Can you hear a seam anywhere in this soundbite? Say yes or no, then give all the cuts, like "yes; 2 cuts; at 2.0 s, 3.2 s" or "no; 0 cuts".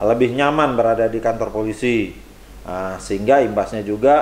no; 0 cuts